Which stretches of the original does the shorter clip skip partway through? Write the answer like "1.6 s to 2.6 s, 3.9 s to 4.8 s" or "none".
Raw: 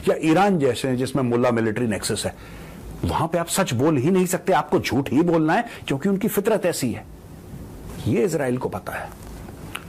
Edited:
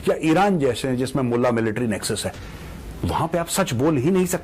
none